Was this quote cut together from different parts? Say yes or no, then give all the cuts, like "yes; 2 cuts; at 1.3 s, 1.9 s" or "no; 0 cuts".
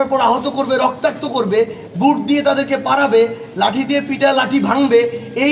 no; 0 cuts